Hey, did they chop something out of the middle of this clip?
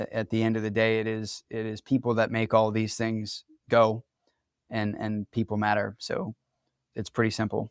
no; 0 cuts

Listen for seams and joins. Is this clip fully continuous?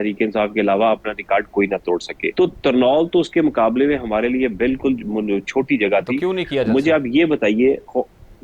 no; 1 cut; at 2.2 s

